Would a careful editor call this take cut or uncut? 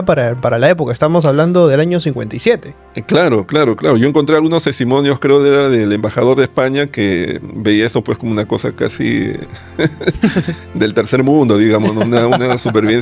uncut